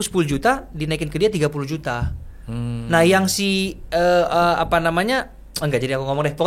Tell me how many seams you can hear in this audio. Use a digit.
0